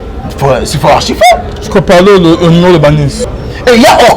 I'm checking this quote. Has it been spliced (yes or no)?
yes